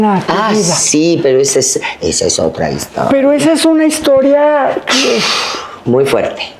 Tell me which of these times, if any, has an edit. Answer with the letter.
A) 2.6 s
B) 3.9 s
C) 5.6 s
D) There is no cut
D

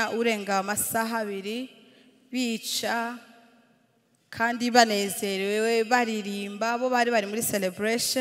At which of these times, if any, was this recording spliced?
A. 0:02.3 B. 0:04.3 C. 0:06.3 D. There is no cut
D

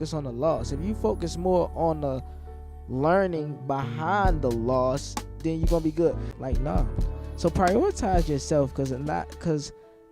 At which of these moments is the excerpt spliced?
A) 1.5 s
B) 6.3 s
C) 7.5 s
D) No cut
B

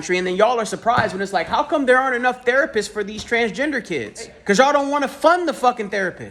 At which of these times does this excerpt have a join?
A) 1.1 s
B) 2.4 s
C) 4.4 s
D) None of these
C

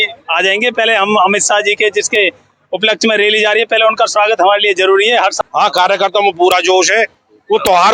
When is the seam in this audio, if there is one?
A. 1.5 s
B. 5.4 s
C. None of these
B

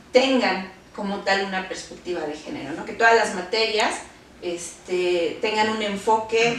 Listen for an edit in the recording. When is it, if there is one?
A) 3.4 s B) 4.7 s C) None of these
C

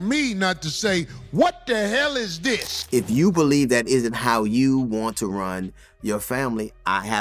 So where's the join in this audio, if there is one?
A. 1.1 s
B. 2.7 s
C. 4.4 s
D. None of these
B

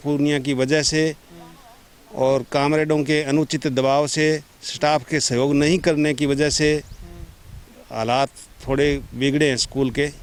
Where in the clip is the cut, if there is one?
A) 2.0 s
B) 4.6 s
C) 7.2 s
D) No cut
D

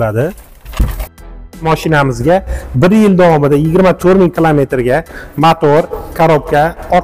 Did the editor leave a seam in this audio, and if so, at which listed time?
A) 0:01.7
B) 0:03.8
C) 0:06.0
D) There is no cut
A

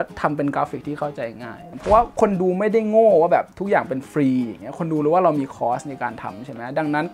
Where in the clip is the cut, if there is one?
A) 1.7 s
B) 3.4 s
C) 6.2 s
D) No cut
A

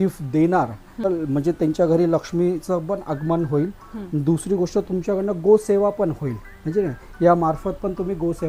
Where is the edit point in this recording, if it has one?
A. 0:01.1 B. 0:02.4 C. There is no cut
A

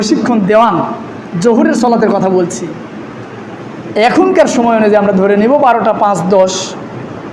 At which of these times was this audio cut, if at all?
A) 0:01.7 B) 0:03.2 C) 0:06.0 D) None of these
D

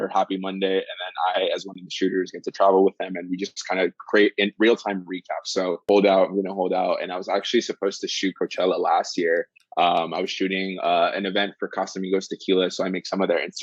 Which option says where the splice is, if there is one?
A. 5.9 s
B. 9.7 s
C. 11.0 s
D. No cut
A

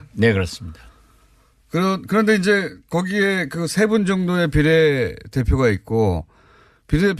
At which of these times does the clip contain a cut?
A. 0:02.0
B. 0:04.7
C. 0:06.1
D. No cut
A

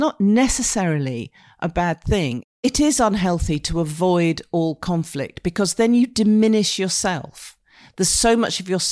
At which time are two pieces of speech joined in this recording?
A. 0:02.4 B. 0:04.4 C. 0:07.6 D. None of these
A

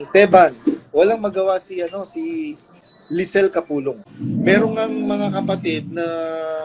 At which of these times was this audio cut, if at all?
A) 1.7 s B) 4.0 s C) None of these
B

